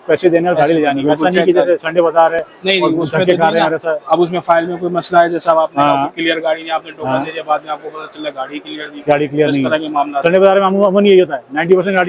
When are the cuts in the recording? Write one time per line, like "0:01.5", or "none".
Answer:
none

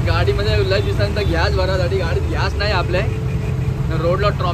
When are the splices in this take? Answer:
none

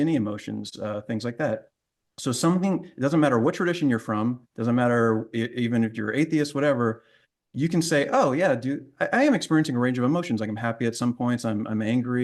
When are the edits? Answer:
none

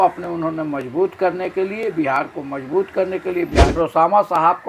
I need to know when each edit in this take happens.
0:03.8

